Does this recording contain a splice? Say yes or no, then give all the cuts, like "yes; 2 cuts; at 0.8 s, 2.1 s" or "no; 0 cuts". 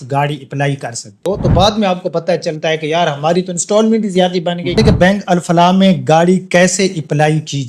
yes; 2 cuts; at 1.2 s, 4.8 s